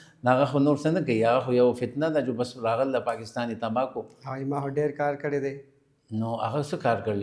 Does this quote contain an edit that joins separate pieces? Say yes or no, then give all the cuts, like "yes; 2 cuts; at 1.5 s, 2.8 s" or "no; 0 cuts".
no; 0 cuts